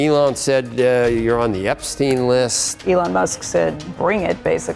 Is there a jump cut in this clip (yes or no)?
yes